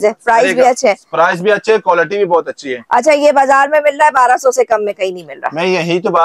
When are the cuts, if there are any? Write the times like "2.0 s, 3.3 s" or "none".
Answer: none